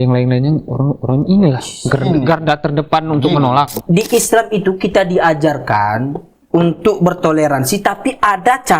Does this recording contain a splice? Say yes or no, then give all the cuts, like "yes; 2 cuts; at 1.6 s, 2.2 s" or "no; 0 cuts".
yes; 1 cut; at 3.8 s